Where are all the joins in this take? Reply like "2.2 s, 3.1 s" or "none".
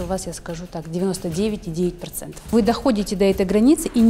2.5 s